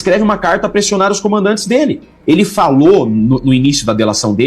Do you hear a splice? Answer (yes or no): yes